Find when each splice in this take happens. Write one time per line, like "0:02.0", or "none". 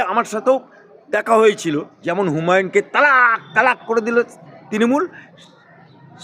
0:02.0